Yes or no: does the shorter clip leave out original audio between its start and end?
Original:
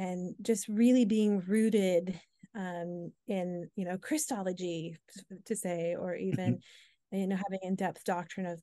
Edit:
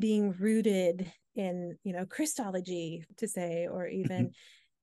yes